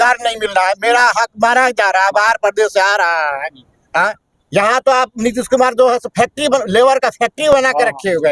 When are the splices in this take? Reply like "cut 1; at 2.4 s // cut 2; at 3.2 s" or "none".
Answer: none